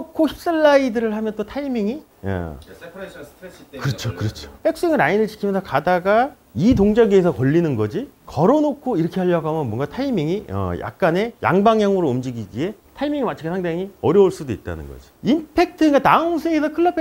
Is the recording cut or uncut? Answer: cut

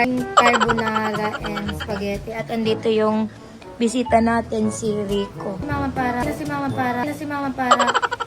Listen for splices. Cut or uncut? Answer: cut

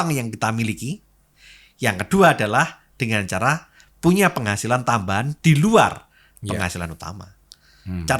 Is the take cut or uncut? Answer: uncut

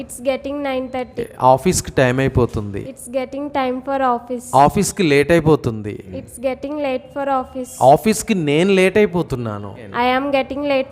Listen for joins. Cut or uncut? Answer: cut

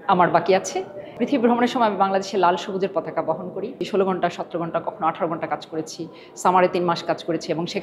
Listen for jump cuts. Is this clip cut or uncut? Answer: cut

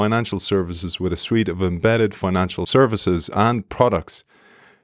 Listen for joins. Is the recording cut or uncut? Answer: cut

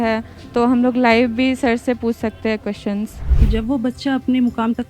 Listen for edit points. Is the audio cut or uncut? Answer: cut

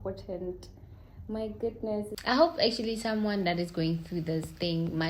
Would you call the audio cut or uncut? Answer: cut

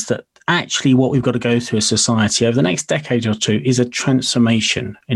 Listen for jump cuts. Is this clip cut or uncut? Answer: uncut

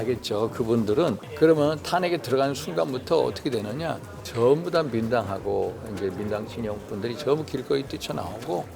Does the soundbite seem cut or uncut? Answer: cut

